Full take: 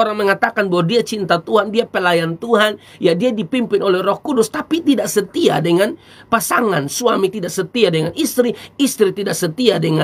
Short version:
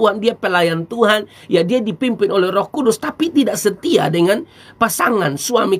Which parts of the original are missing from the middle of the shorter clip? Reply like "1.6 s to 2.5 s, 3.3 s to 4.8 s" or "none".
none